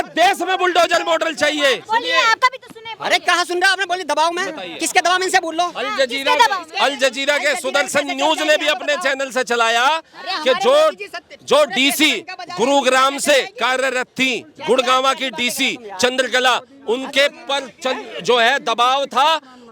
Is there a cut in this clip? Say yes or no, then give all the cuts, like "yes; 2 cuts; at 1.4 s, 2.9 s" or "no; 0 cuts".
yes; 1 cut; at 1.8 s